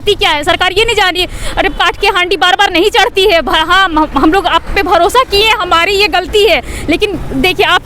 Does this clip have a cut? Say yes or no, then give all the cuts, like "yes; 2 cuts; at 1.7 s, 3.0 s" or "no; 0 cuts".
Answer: no; 0 cuts